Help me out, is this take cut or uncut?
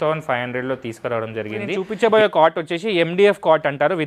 cut